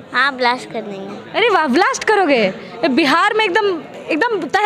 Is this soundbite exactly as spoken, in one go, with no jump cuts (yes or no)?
yes